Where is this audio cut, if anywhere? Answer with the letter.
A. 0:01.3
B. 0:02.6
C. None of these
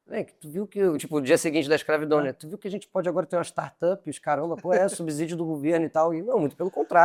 C